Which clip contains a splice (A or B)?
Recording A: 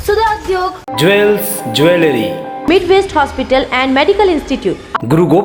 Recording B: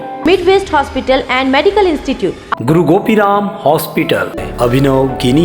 B